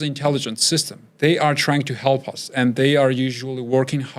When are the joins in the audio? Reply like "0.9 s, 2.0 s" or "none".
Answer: 1.0 s